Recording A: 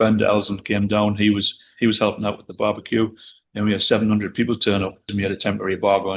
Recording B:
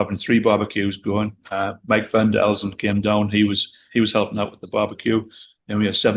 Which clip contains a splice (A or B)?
A